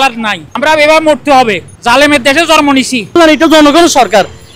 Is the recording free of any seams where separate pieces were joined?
no; 1 cut; at 3.2 s

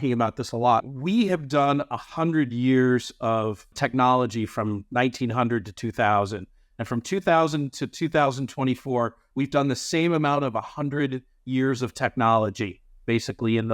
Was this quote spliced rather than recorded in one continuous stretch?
yes; 2 cuts; at 0.9 s, 3.7 s

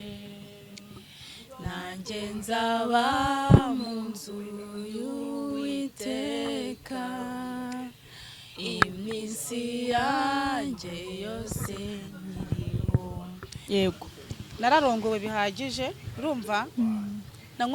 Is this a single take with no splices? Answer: no; 1 cut; at 13.5 s

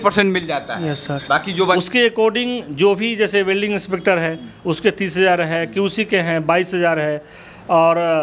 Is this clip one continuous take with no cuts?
no; 1 cut; at 1.7 s

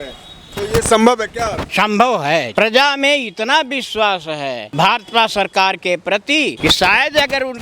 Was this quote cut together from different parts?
yes; 4 cuts; at 1.6 s, 2.5 s, 4.6 s, 6.6 s

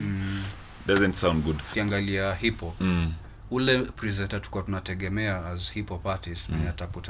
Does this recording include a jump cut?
yes; 1 cut; at 1.7 s

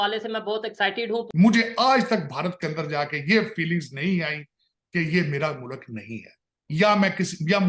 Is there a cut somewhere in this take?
yes; 1 cut; at 1.3 s

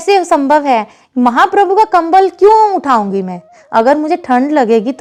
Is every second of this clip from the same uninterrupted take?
yes; 0 cuts

